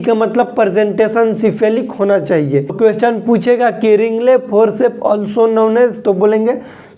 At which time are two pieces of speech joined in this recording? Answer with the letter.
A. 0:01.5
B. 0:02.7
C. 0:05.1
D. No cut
B